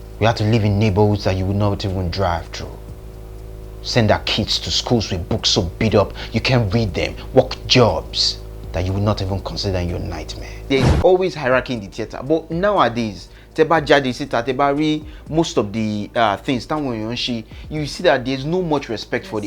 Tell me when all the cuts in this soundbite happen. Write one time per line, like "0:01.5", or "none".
0:10.7